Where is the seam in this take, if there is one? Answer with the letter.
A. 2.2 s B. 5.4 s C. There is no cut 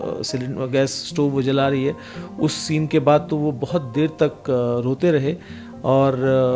C